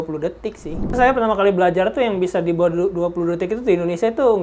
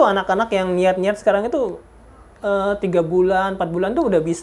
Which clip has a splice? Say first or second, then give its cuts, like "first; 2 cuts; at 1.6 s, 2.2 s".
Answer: first; 1 cut; at 1.0 s